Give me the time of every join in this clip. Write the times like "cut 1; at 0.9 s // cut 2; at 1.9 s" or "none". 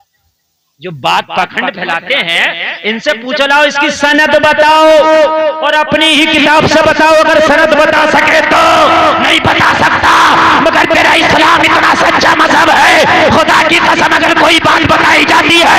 none